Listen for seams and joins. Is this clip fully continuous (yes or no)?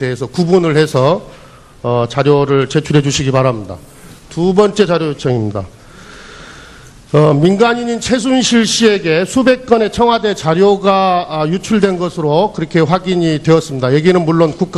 no